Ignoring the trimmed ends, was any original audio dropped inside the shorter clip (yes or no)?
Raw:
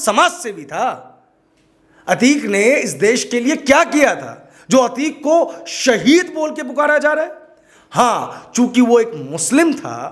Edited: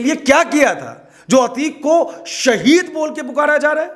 no